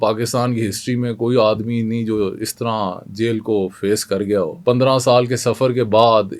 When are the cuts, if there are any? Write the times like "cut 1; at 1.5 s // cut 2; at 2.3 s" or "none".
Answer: cut 1; at 4.5 s

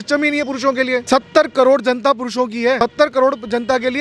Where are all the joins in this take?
cut 1; at 1.0 s // cut 2; at 2.8 s

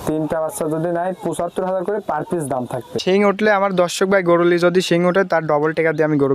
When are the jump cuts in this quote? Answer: cut 1; at 2.9 s

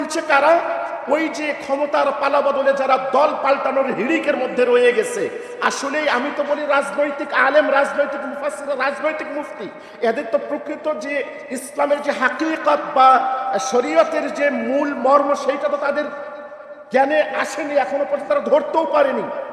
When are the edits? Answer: none

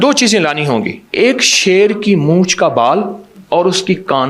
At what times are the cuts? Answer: cut 1; at 1.0 s

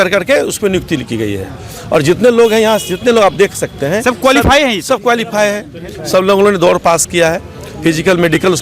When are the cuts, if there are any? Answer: none

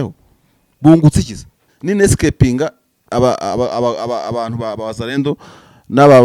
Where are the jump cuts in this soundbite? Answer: cut 1; at 1.7 s

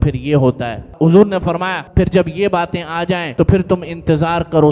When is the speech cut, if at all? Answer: cut 1; at 0.9 s // cut 2; at 1.8 s // cut 3; at 3.3 s

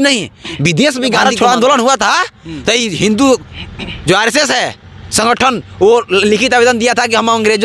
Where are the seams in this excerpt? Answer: cut 1; at 1.2 s

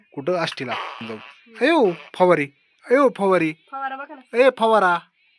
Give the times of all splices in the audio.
cut 1; at 0.9 s

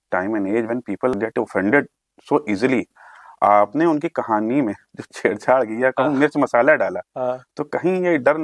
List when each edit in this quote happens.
none

